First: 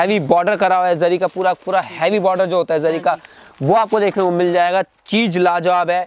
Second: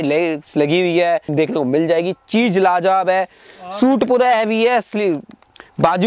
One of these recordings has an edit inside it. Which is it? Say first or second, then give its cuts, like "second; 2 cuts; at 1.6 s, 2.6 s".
second; 1 cut; at 1.3 s